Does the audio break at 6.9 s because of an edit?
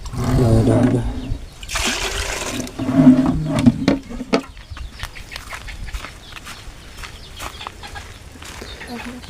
no; 1 cut; at 4.6 s

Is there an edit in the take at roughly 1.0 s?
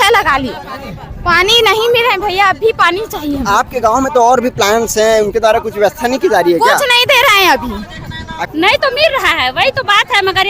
no; 1 cut; at 8.4 s

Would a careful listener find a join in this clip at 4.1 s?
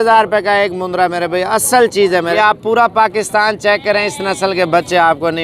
no; 1 cut; at 2.4 s

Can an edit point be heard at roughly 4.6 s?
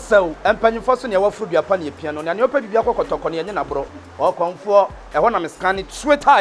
no; 0 cuts

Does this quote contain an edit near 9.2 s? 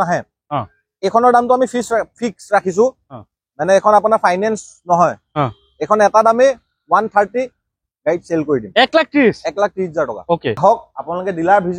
no; 1 cut; at 10.6 s

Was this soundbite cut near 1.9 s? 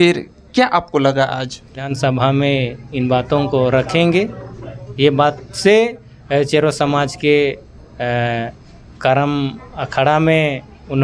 yes; 1 cut; at 1.9 s

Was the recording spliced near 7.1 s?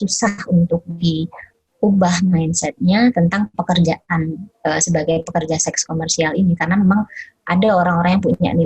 no; 0 cuts

